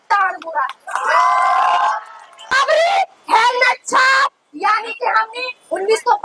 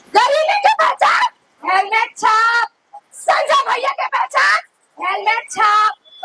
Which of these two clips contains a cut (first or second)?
first